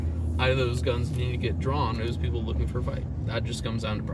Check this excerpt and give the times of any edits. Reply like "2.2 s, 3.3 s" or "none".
3.1 s